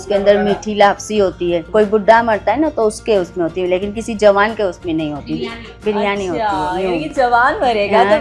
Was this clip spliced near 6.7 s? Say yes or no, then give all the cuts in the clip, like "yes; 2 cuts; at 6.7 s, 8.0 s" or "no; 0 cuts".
no; 1 cut; at 1.7 s